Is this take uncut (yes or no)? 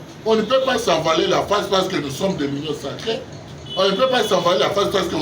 yes